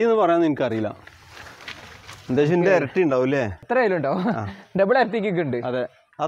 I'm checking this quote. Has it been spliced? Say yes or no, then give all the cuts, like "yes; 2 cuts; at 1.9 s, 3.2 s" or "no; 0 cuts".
yes; 1 cut; at 3.6 s